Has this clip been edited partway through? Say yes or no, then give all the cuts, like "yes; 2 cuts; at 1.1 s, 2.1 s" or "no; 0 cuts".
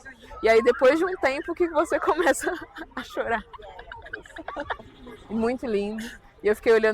yes; 1 cut; at 4.8 s